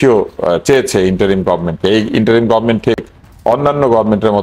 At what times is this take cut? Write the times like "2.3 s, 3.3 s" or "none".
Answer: none

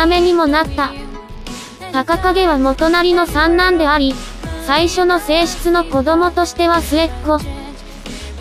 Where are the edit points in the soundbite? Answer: 6.8 s

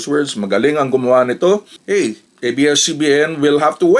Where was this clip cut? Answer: 1.7 s

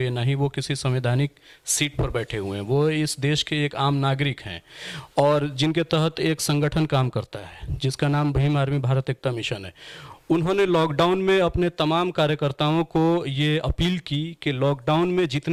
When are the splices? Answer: none

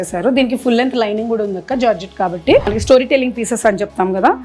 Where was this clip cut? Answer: 2.7 s

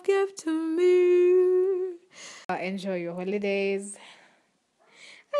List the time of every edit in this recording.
2.5 s

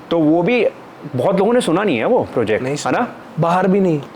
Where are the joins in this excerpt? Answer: 3.1 s

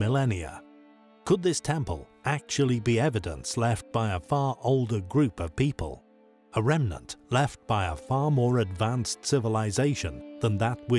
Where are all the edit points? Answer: 8.7 s

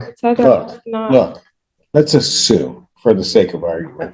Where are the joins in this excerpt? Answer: none

